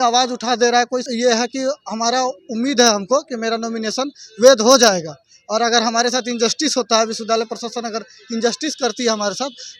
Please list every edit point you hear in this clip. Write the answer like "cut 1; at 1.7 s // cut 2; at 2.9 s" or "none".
cut 1; at 1.0 s

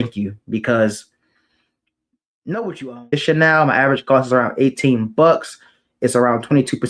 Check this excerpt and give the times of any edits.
cut 1; at 3.1 s

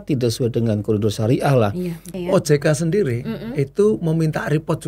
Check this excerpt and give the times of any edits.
cut 1; at 2.1 s

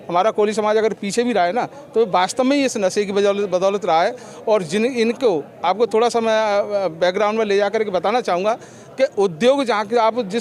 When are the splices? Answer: none

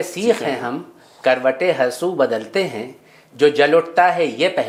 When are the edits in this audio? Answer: none

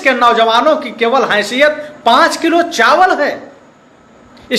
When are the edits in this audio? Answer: none

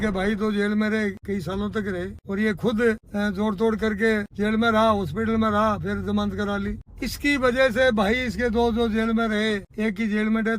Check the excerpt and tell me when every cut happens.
cut 1; at 1.2 s // cut 2; at 2.2 s // cut 3; at 3.1 s // cut 4; at 4.3 s // cut 5; at 6.9 s // cut 6; at 9.7 s

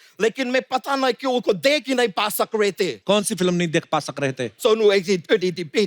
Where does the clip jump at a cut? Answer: cut 1; at 3.0 s // cut 2; at 4.5 s

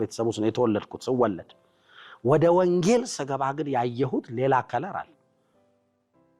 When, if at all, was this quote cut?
none

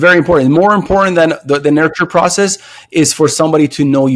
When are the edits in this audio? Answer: none

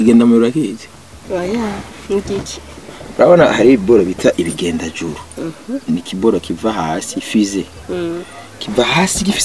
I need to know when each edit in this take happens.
none

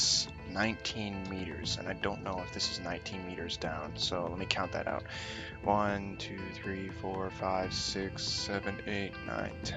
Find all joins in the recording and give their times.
none

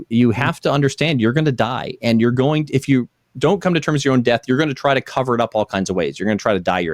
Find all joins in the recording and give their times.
none

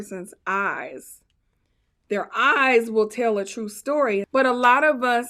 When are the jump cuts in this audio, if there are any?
cut 1; at 4.3 s

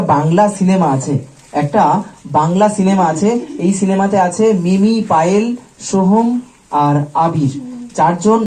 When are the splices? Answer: none

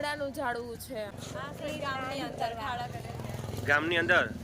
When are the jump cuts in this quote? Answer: cut 1; at 1.1 s

